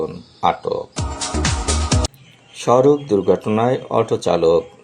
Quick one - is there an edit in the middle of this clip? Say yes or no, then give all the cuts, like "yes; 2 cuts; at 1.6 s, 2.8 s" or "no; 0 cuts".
yes; 2 cuts; at 0.9 s, 2.2 s